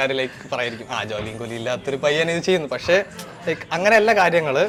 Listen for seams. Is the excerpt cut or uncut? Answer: uncut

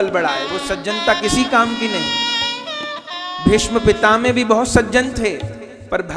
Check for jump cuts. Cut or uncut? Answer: uncut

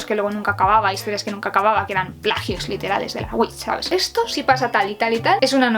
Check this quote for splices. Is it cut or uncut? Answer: cut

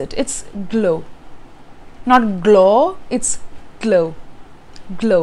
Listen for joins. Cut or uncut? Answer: uncut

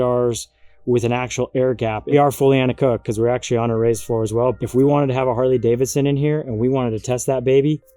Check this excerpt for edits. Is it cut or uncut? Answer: cut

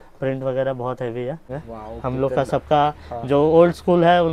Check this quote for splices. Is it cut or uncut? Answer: cut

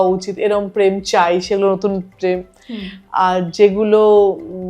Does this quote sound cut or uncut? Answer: uncut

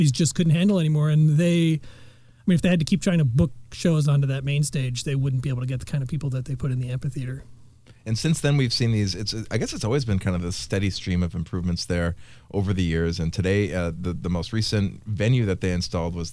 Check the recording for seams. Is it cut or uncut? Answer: uncut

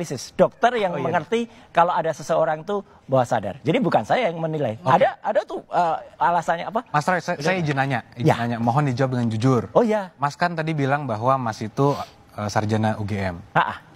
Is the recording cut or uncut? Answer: cut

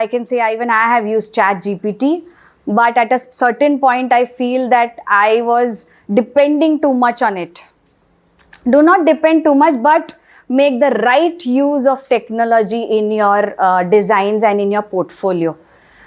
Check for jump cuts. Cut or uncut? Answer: uncut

